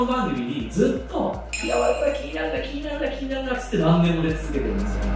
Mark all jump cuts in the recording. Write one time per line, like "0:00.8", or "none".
0:01.5